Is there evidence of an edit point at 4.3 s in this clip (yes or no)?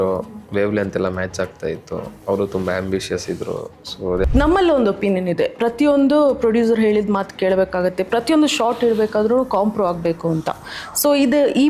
yes